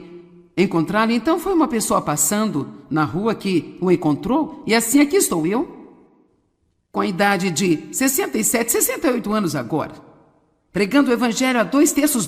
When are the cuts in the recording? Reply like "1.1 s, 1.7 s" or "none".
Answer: 8.9 s